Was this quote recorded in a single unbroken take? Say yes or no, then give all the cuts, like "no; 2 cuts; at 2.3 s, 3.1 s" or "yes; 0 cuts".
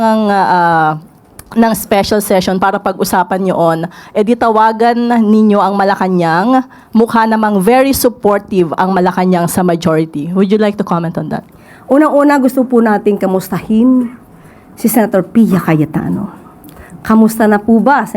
yes; 0 cuts